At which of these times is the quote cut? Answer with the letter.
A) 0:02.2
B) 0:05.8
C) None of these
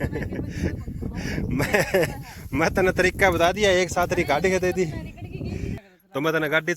B